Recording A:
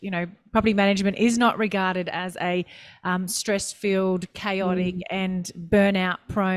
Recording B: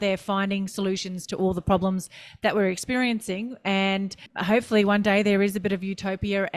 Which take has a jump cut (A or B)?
B